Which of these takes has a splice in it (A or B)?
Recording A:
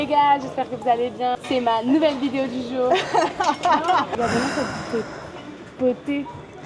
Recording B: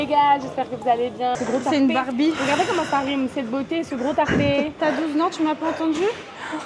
B